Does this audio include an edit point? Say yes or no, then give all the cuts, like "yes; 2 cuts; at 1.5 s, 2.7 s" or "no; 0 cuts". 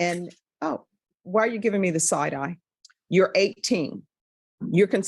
yes; 1 cut; at 2.9 s